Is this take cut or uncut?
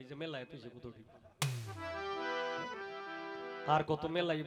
uncut